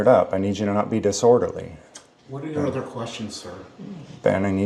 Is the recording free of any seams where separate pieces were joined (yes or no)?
yes